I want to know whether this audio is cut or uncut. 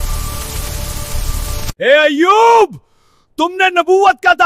cut